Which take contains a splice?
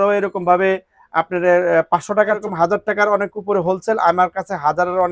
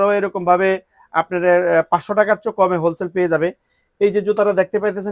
first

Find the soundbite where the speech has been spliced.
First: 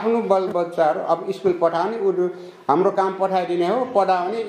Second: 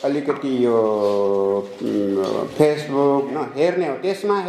second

